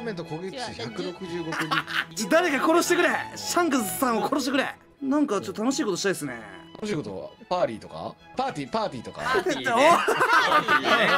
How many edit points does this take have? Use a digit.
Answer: 3